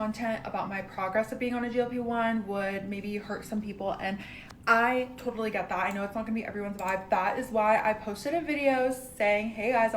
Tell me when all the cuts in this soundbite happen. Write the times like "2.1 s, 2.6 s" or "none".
2.1 s